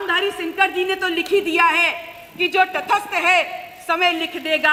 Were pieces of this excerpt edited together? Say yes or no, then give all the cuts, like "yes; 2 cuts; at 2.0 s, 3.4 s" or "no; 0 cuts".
no; 0 cuts